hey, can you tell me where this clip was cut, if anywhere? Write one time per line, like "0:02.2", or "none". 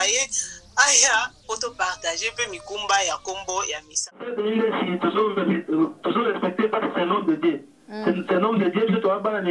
0:04.3